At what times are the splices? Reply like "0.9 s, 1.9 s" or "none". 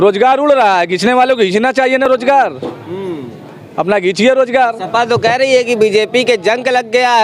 none